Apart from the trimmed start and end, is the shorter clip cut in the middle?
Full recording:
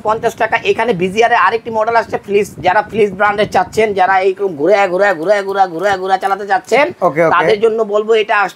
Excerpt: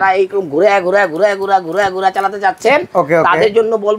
no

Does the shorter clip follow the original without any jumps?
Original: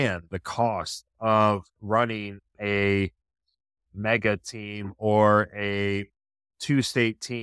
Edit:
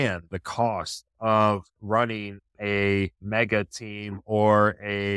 no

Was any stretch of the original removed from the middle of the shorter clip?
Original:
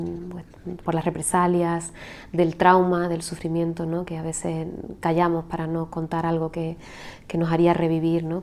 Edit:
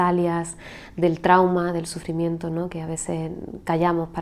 no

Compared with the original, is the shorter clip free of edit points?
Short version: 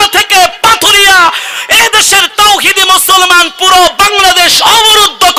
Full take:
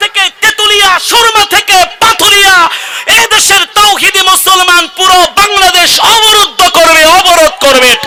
yes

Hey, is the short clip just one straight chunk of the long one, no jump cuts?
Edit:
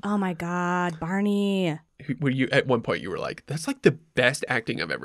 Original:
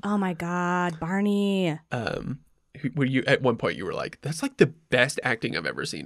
no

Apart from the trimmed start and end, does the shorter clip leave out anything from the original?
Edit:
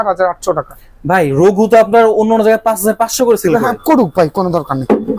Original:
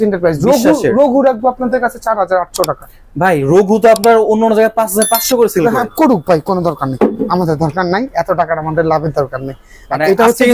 no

